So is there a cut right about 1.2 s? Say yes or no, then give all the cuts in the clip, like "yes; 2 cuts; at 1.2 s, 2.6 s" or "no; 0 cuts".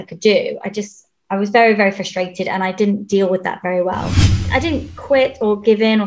yes; 2 cuts; at 1.2 s, 4.4 s